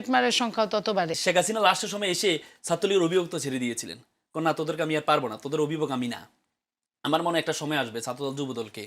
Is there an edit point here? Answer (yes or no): yes